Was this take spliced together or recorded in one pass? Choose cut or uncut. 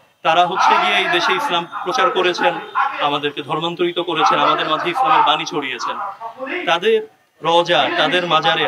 uncut